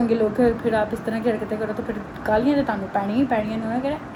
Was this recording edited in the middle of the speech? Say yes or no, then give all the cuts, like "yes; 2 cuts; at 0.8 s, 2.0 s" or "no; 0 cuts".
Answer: no; 0 cuts